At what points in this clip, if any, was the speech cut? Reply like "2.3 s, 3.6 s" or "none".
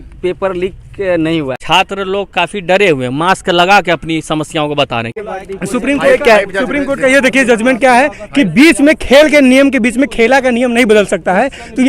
1.6 s, 5.2 s